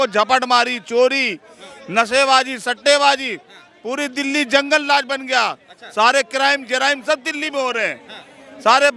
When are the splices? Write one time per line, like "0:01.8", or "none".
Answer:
none